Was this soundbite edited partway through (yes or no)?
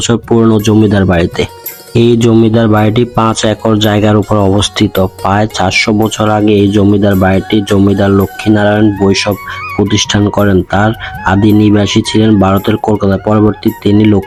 no